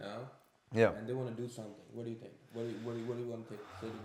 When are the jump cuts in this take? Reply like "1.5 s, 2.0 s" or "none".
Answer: none